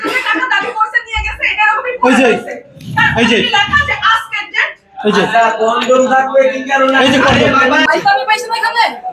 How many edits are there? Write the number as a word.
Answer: one